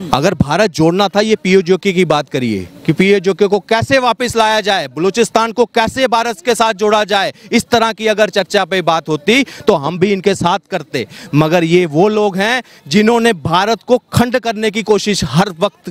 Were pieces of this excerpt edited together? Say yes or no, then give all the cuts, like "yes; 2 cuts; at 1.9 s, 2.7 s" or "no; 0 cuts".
no; 0 cuts